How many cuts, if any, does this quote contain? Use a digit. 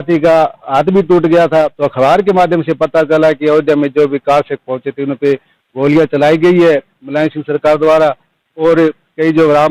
1